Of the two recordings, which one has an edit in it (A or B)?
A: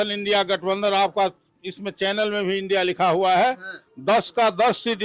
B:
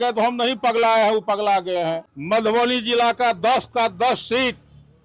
B